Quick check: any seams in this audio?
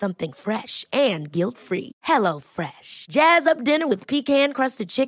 no; 0 cuts

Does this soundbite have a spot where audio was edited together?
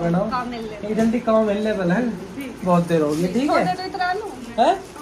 no; 0 cuts

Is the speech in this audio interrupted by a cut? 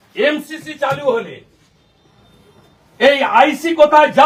no; 0 cuts

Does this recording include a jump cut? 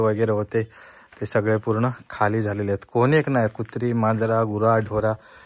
no; 0 cuts

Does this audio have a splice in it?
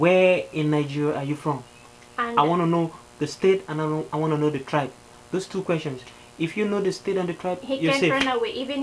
no; 0 cuts

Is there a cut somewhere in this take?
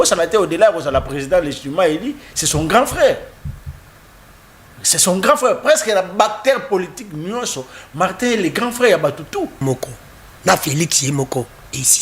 yes; 1 cut; at 9.6 s

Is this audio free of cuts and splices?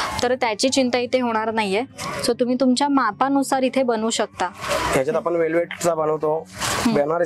yes; 0 cuts

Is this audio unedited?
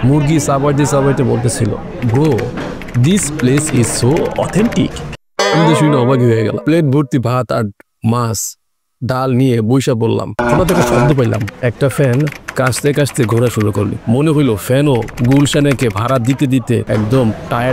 no; 2 cuts; at 6.6 s, 10.4 s

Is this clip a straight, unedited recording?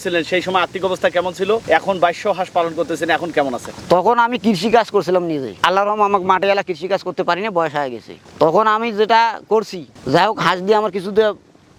yes; 0 cuts

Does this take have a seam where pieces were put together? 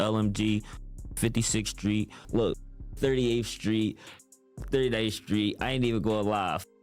yes; 1 cut; at 2.2 s

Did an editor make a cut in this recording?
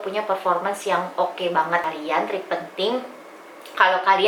yes; 1 cut; at 1.8 s

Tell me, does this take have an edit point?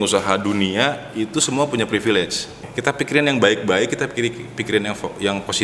yes; 1 cut; at 2.7 s

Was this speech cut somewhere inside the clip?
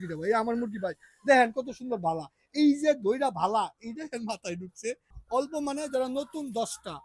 yes; 1 cut; at 5.1 s

